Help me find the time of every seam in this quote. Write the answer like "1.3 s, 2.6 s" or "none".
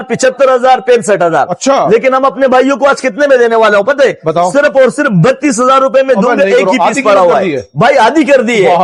none